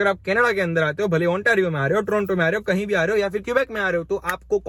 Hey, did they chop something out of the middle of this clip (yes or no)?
no